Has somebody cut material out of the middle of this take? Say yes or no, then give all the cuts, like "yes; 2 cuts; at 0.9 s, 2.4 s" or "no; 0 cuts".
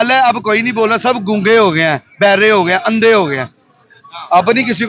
no; 0 cuts